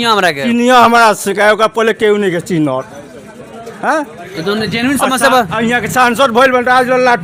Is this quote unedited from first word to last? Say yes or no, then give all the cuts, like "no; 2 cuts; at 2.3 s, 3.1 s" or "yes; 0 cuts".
yes; 0 cuts